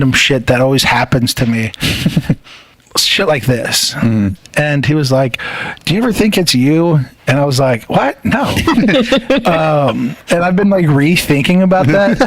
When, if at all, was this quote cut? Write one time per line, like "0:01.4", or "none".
0:02.7